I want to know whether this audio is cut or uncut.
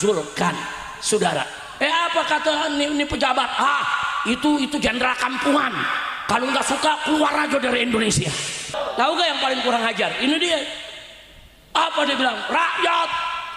cut